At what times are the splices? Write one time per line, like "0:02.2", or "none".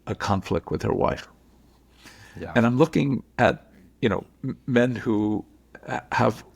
none

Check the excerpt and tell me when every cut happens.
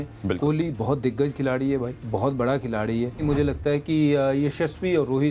0:03.2

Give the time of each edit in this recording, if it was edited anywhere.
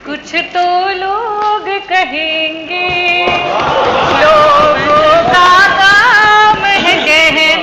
none

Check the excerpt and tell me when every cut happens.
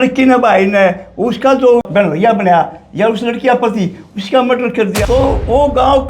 0:01.9
0:05.0

